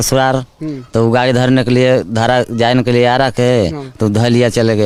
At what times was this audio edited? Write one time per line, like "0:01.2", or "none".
none

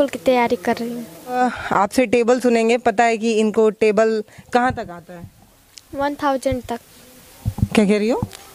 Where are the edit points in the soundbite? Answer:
0:01.4

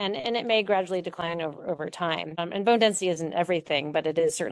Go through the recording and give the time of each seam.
none

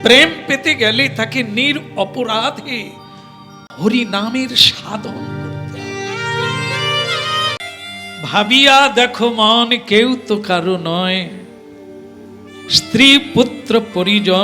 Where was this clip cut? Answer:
0:07.6

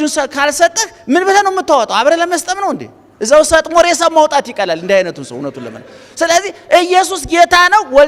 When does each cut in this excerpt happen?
none

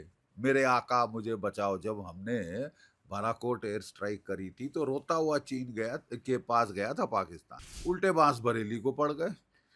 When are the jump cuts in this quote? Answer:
0:07.7

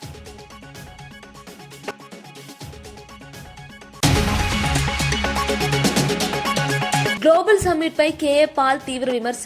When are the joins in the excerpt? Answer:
none

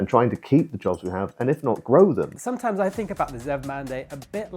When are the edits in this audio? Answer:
0:02.4

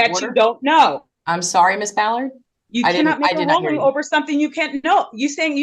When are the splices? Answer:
none

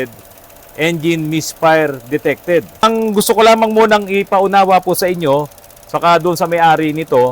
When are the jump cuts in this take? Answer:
0:02.8

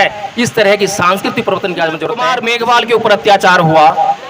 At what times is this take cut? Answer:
0:02.3

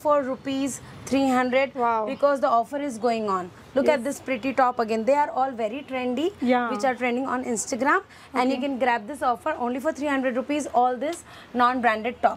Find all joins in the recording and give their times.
none

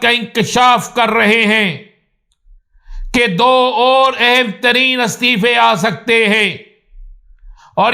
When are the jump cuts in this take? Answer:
none

